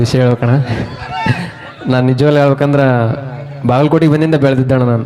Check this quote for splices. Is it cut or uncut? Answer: uncut